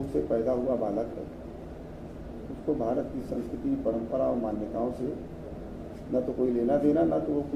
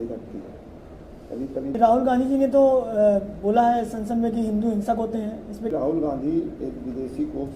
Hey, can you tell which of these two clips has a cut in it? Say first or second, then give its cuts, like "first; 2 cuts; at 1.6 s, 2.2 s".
second; 2 cuts; at 1.8 s, 5.7 s